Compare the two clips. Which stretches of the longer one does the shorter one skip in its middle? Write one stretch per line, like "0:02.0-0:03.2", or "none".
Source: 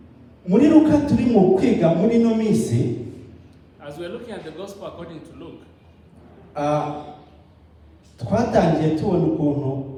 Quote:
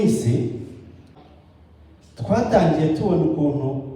0:03.7-0:07.2